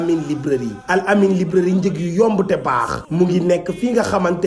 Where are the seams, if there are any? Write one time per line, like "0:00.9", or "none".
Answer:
none

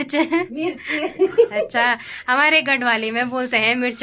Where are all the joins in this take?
none

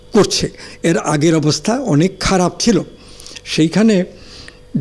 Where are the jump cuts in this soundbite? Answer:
none

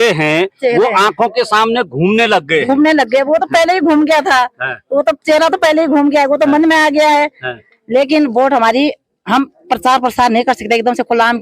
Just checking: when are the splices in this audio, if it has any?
none

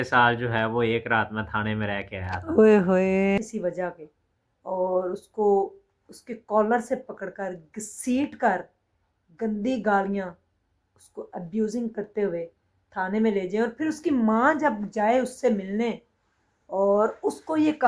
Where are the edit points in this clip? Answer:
0:03.4

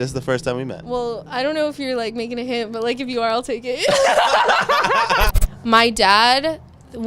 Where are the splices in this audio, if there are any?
0:05.4

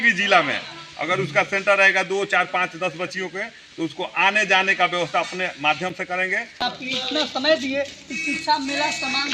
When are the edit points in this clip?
0:06.6

